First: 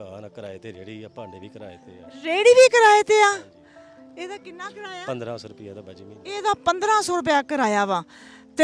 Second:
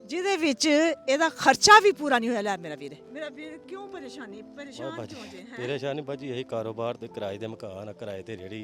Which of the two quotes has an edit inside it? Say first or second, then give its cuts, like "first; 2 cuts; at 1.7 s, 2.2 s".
second; 1 cut; at 3.0 s